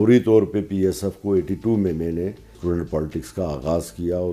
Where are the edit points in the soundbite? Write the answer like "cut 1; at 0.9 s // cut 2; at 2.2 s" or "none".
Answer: cut 1; at 2.6 s